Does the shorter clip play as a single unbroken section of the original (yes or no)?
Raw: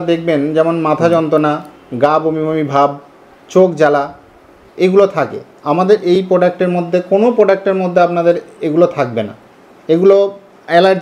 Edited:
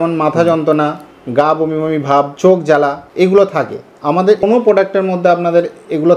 no